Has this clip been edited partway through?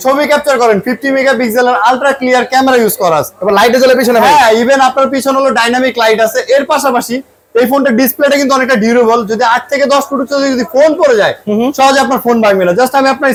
no; 0 cuts

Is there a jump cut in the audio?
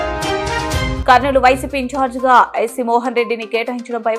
no; 0 cuts

